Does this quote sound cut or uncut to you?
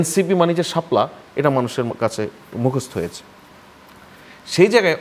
uncut